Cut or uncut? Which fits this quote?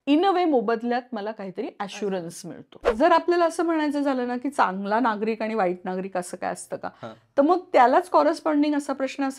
cut